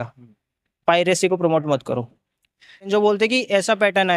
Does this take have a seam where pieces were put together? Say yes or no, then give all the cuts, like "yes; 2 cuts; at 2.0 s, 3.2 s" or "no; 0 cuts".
yes; 1 cut; at 2.9 s